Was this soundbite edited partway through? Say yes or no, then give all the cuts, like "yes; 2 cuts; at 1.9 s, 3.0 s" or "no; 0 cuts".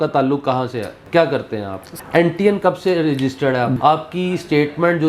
yes; 3 cuts; at 1.0 s, 1.9 s, 3.8 s